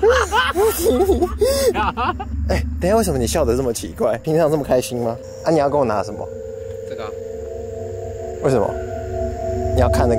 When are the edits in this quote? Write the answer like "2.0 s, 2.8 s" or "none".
1.8 s